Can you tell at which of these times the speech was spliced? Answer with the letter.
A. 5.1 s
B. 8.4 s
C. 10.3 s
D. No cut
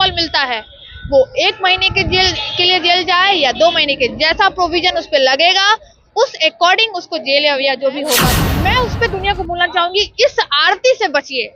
B